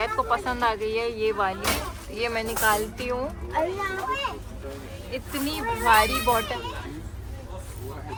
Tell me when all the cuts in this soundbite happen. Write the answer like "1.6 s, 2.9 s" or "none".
none